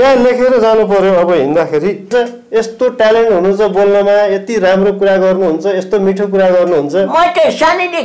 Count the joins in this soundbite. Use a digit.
1